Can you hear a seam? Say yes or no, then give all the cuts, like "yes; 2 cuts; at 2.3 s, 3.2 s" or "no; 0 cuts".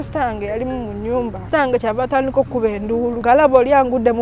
yes; 2 cuts; at 1.4 s, 3.2 s